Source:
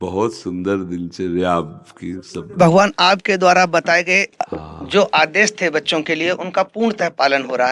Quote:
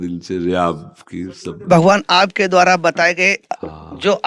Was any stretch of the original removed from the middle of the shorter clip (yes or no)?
no